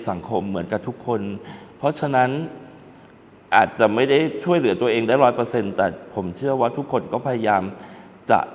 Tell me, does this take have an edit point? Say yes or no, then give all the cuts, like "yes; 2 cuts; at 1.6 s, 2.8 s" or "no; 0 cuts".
no; 0 cuts